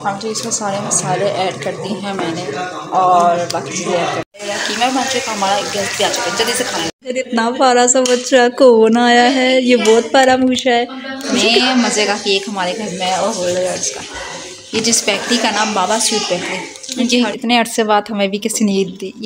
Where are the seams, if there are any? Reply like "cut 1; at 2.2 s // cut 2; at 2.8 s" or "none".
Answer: cut 1; at 4.4 s // cut 2; at 7.0 s // cut 3; at 11.5 s // cut 4; at 17.3 s